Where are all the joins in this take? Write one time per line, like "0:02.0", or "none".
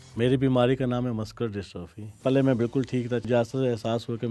0:02.2
0:03.2